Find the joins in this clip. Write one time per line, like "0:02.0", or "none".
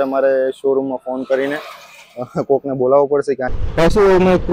0:03.5